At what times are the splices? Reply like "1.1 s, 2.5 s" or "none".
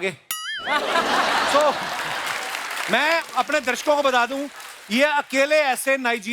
none